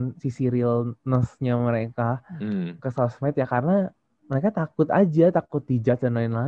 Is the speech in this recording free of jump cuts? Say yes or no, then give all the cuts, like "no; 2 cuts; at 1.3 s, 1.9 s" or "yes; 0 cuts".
yes; 0 cuts